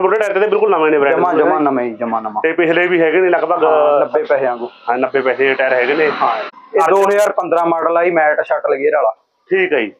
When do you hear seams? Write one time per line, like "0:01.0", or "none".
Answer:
0:06.5